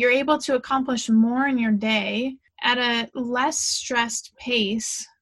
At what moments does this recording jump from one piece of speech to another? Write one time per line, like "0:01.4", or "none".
0:02.5